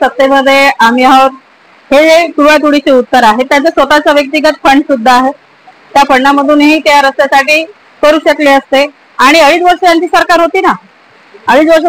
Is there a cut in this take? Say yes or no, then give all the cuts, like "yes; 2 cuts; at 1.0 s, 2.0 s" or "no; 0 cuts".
no; 0 cuts